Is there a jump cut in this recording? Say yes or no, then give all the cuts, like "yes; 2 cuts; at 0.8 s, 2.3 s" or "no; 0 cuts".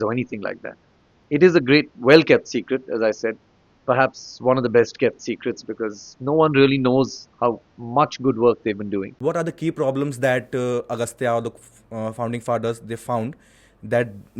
yes; 2 cuts; at 1.2 s, 9.1 s